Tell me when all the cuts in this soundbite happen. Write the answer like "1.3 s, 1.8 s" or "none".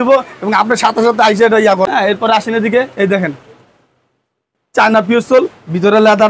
1.9 s